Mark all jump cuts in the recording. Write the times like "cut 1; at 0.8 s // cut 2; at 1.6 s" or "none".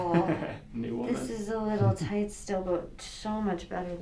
none